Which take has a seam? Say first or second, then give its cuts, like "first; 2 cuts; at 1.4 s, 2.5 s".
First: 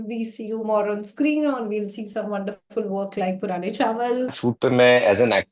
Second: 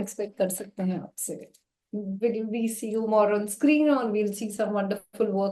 first; 1 cut; at 4.3 s